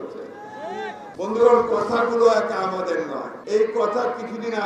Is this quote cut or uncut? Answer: cut